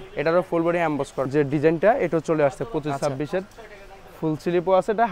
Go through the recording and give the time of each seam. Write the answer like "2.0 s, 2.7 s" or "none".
1.3 s